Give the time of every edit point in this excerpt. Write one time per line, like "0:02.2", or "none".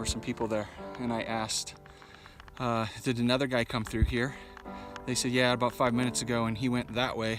none